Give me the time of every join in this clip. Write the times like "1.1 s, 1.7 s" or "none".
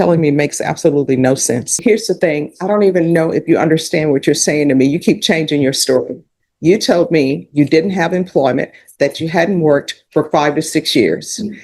1.7 s